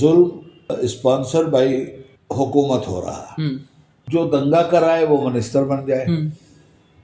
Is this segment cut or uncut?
cut